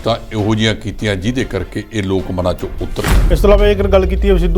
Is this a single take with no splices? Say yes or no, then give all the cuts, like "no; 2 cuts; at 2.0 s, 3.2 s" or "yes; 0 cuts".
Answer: no; 1 cut; at 3.2 s